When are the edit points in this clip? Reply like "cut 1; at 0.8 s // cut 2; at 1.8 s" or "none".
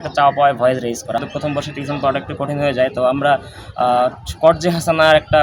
cut 1; at 1.2 s